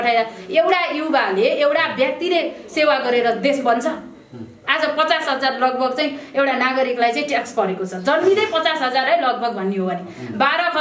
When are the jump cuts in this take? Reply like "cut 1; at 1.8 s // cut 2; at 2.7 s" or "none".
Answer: none